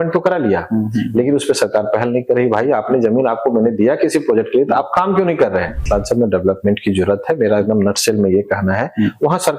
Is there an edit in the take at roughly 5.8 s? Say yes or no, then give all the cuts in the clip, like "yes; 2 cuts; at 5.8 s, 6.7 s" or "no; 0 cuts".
yes; 1 cut; at 5.8 s